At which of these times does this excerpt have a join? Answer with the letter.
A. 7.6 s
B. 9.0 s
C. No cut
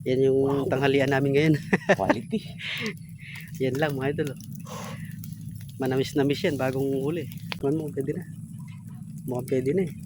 A